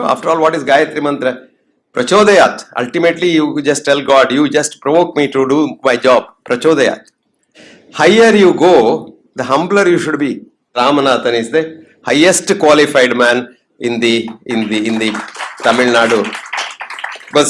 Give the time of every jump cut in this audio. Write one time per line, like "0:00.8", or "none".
0:07.6
0:10.6